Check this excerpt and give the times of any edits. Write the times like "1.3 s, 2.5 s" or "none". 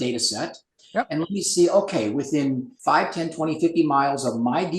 2.7 s